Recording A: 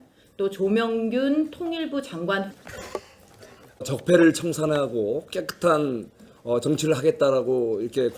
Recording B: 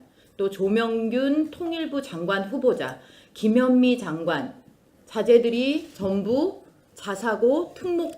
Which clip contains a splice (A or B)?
B